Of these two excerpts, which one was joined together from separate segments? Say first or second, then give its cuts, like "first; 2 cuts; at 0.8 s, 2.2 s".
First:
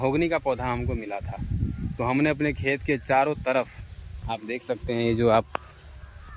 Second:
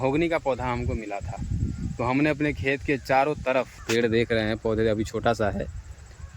second; 1 cut; at 3.8 s